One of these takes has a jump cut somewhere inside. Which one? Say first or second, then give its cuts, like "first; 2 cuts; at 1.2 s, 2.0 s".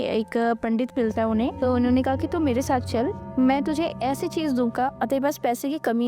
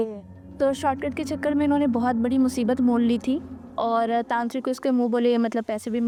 first; 3 cuts; at 1.6 s, 3.2 s, 4.9 s